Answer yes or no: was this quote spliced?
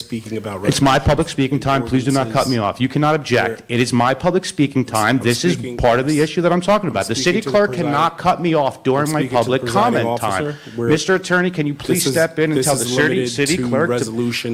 no